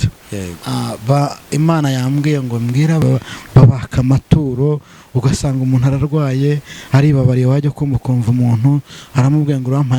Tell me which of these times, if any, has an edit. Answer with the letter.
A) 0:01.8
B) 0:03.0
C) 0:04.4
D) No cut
B